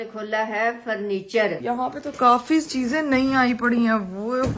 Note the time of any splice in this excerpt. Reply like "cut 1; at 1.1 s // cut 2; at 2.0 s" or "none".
cut 1; at 1.6 s